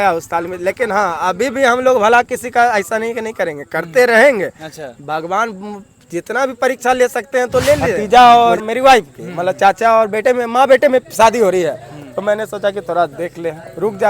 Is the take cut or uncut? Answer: cut